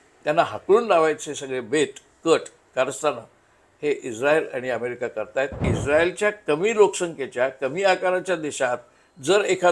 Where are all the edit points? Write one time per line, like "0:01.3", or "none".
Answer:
0:05.7